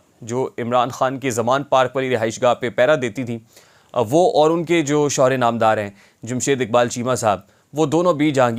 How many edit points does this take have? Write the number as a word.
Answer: zero